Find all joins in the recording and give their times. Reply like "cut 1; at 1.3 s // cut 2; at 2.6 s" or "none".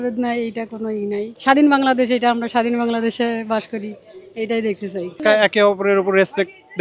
cut 1; at 5.1 s

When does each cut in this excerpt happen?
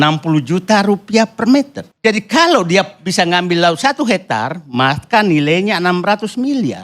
cut 1; at 1.8 s

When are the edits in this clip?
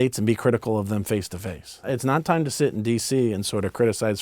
cut 1; at 1.8 s

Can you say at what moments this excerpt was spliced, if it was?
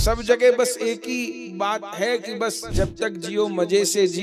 cut 1; at 2.7 s

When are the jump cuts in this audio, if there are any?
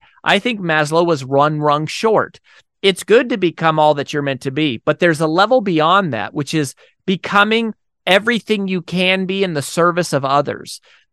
none

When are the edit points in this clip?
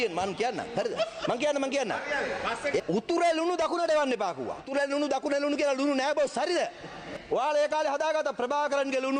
cut 1; at 2.8 s // cut 2; at 4.7 s // cut 3; at 7.0 s

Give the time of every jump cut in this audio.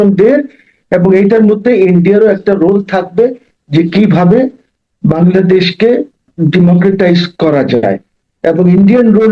cut 1; at 6.3 s

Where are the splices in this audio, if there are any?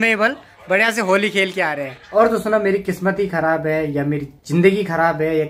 cut 1; at 1.9 s

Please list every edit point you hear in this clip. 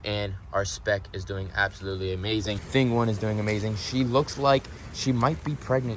cut 1; at 2.6 s

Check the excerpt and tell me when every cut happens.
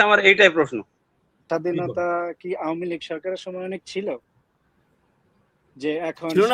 cut 1; at 1.4 s

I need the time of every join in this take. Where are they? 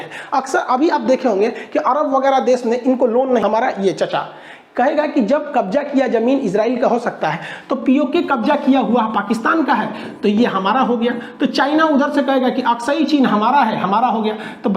cut 1; at 3.4 s

